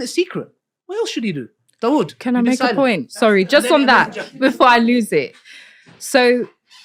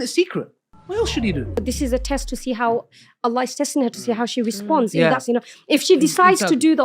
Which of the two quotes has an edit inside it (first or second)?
second